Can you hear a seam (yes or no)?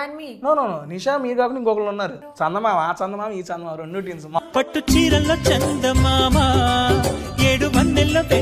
yes